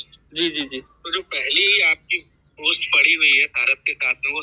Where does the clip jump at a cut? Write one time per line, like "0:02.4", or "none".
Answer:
none